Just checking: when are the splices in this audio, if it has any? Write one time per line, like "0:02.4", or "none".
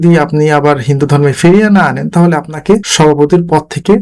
0:02.9